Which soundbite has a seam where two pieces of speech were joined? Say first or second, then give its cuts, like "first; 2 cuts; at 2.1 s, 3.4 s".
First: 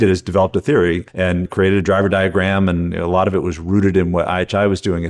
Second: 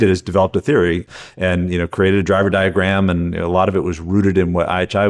first; 1 cut; at 1.3 s